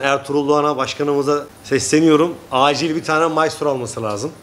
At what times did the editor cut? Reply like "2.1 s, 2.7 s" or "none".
1.5 s